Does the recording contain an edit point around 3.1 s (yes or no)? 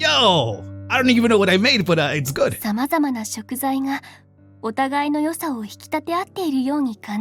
no